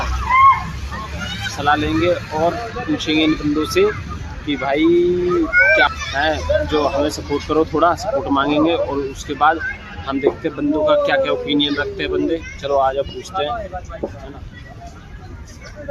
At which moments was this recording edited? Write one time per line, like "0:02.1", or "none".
0:05.9